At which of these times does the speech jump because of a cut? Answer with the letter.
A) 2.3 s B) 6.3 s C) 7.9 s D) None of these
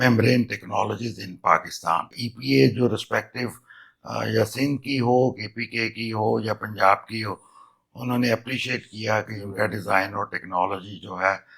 A